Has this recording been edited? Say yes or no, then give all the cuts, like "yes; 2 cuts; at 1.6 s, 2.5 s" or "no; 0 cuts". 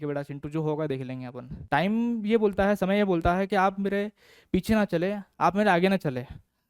yes; 1 cut; at 1.5 s